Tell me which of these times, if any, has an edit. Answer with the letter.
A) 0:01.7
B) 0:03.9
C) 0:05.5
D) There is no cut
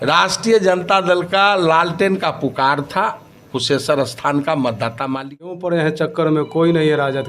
C